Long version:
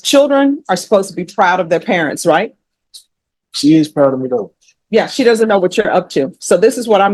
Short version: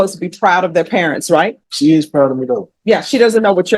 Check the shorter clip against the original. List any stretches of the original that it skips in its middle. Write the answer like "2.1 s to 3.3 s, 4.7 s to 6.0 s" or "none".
2.6 s to 3.5 s, 4.5 s to 4.8 s